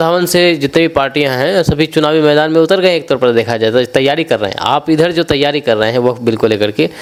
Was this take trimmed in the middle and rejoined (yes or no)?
no